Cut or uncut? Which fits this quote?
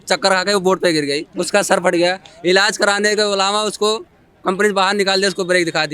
uncut